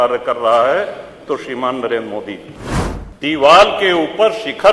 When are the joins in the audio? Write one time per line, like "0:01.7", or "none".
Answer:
0:02.5

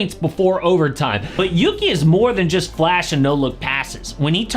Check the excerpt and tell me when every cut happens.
0:01.2

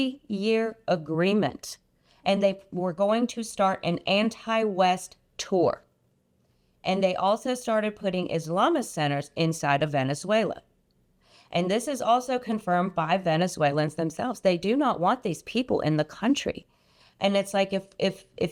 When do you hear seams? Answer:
none

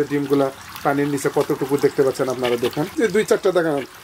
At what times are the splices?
0:02.9

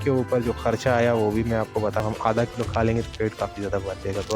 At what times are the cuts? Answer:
0:02.0

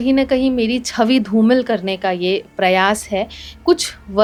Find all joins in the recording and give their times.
none

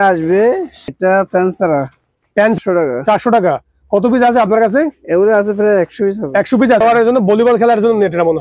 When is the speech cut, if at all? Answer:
0:00.9
0:02.6
0:06.8

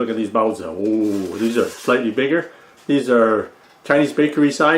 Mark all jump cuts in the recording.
none

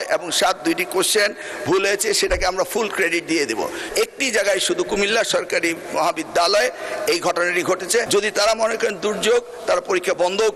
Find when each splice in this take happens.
0:03.8
0:08.1

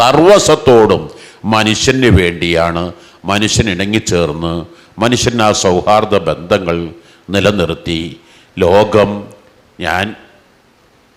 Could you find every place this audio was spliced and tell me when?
none

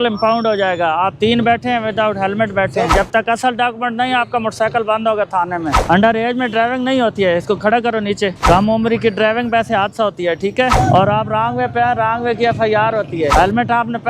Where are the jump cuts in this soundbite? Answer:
0:02.9
0:05.8
0:08.4
0:10.7
0:13.3

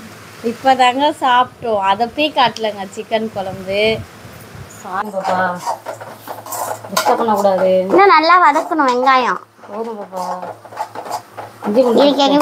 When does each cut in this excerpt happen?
0:05.0

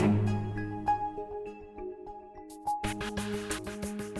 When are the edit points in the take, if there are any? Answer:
none

